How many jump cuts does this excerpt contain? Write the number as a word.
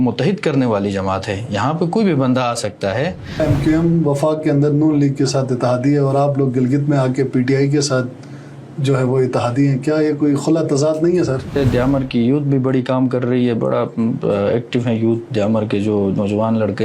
two